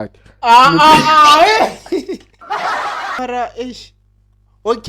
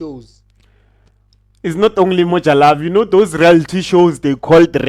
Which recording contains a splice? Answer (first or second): first